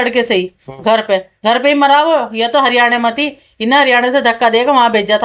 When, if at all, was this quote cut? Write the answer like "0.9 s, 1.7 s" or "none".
none